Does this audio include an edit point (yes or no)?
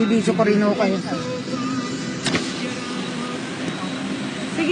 yes